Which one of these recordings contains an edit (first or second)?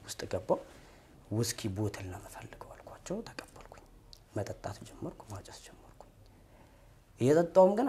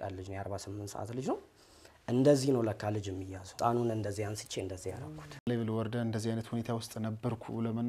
second